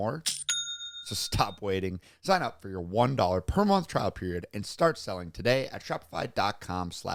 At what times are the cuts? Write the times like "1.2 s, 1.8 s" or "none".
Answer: none